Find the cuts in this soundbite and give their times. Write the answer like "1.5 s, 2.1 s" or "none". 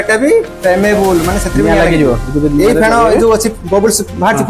none